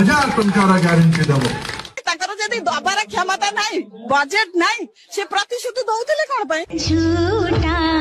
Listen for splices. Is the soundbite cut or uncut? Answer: uncut